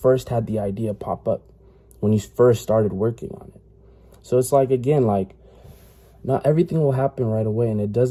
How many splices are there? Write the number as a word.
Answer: zero